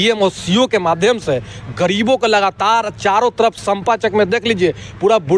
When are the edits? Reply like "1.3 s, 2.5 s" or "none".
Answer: none